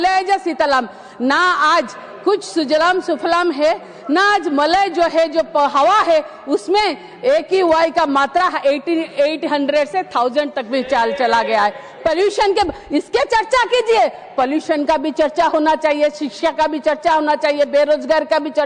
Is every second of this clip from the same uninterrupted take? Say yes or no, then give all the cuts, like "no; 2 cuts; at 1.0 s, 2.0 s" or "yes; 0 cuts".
yes; 0 cuts